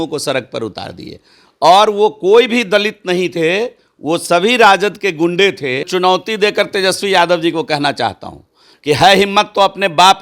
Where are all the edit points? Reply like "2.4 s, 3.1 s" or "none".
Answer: 5.9 s